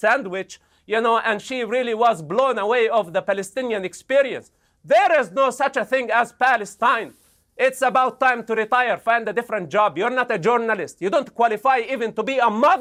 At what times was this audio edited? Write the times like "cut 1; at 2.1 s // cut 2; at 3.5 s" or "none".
none